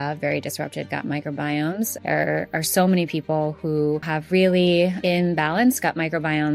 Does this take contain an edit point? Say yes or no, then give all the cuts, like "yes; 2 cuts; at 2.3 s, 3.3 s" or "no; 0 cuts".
yes; 3 cuts; at 2.0 s, 4.1 s, 5.0 s